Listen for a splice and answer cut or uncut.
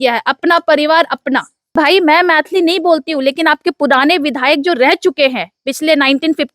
cut